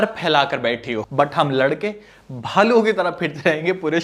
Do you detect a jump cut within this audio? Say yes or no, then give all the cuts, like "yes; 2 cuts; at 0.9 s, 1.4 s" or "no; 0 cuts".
yes; 1 cut; at 1.0 s